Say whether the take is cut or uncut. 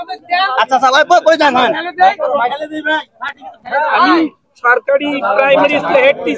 uncut